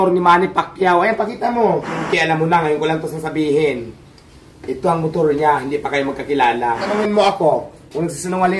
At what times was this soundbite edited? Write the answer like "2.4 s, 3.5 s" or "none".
2.0 s, 7.0 s